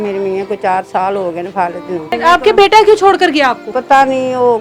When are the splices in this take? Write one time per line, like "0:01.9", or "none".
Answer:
0:02.1
0:03.7

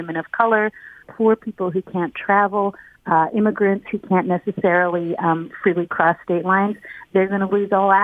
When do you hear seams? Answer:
0:01.0

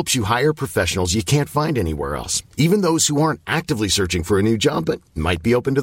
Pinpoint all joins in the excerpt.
none

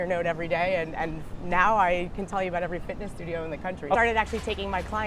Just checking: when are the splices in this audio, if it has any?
0:04.0

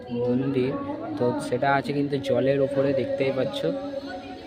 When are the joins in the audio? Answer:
none

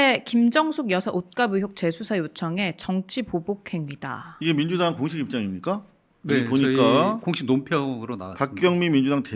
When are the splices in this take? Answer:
none

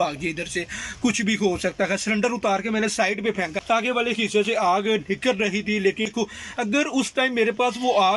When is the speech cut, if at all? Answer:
0:03.6
0:06.1

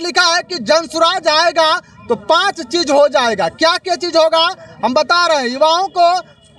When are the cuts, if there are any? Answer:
none

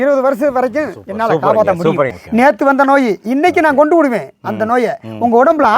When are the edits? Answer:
0:02.2

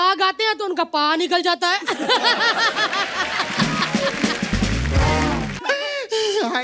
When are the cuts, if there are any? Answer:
0:05.6

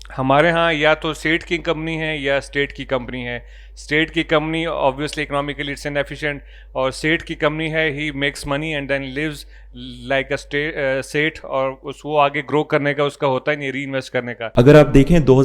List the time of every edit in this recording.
0:14.4

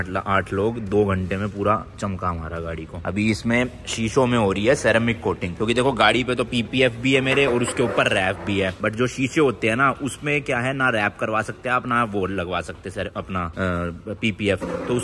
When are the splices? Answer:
none

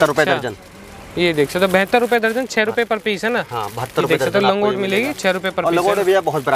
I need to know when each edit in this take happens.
none

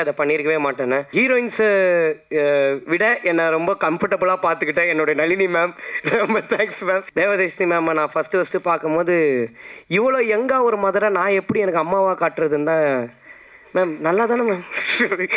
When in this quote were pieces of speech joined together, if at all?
0:01.1
0:07.1

